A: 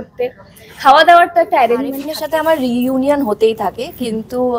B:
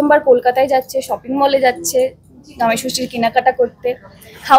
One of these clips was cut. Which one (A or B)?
A